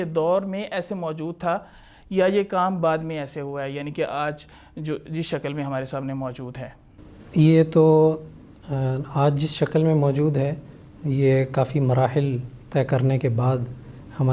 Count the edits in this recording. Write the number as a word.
zero